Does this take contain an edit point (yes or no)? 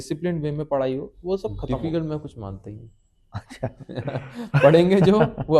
yes